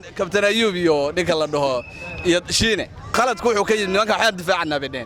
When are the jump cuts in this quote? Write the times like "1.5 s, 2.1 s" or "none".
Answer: 3.1 s

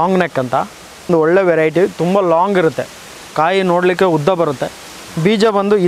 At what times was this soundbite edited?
1.1 s

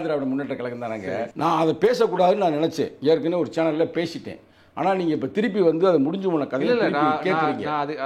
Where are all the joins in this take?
1.3 s

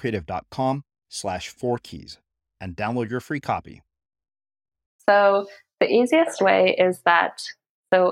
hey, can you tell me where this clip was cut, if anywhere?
4.9 s

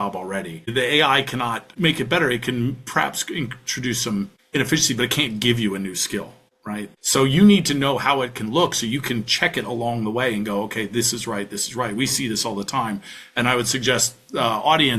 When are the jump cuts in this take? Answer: none

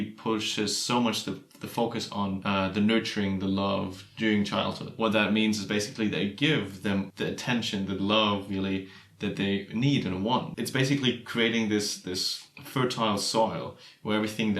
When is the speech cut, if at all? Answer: 2.4 s, 4.9 s, 7.1 s, 10.6 s

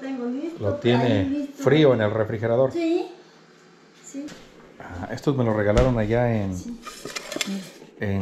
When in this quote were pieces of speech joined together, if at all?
4.4 s

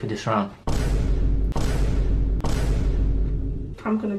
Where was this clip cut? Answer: none

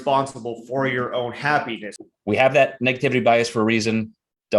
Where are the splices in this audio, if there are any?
1.9 s

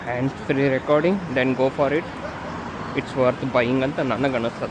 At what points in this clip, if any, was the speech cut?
none

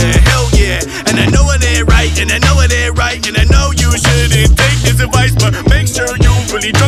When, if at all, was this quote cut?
none

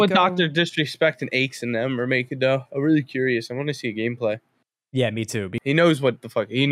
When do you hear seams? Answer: 5.5 s

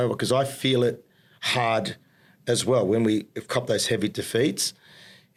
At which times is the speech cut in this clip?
none

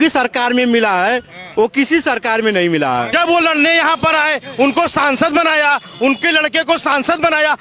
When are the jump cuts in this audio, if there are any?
3.1 s

